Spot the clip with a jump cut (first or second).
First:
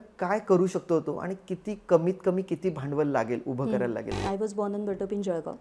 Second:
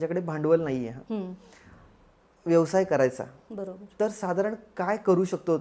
first